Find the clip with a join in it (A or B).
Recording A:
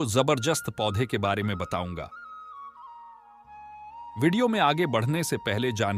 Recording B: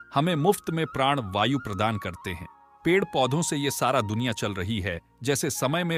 A